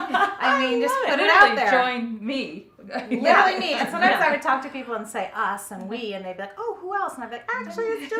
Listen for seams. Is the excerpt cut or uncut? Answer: uncut